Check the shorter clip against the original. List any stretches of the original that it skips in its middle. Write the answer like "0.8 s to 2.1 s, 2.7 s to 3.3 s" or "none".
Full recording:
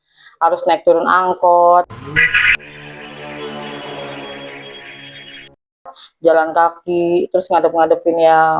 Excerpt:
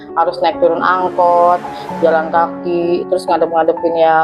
2.0 s to 6.0 s